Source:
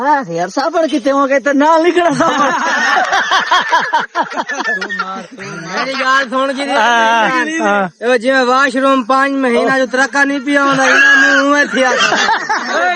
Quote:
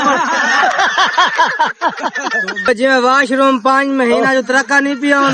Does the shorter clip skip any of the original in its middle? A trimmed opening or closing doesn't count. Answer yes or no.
yes